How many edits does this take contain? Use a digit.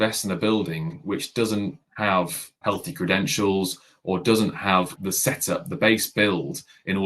3